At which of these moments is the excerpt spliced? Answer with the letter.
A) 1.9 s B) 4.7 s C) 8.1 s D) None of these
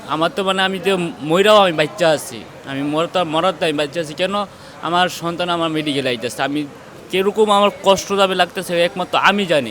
D